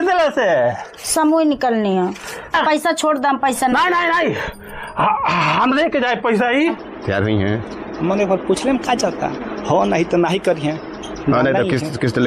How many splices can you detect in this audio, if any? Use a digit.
2